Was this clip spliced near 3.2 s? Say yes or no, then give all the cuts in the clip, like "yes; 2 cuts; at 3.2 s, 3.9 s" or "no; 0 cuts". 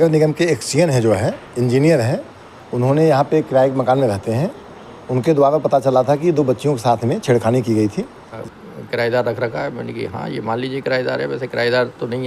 no; 1 cut; at 8.4 s